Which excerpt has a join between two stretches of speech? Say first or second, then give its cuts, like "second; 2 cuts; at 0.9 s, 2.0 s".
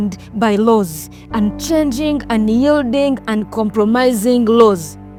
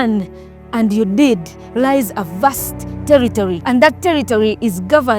second; 1 cut; at 3.6 s